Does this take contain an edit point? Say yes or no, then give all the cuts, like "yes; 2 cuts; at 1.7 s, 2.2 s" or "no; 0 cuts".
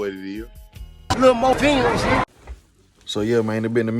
yes; 1 cut; at 2.2 s